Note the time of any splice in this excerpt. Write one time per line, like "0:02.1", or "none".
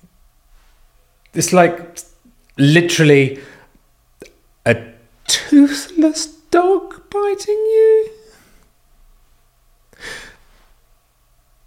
none